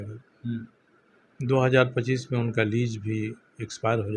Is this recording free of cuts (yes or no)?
yes